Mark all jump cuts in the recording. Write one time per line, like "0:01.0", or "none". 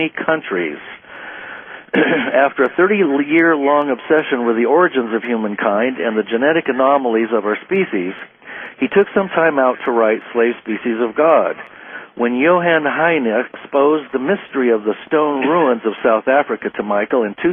0:13.5